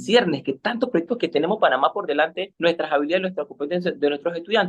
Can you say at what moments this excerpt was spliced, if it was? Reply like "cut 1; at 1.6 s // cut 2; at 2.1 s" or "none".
cut 1; at 2.5 s